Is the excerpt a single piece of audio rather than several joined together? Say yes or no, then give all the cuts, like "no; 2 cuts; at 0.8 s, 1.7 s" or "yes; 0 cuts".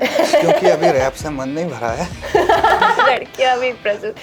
no; 2 cuts; at 0.9 s, 3.0 s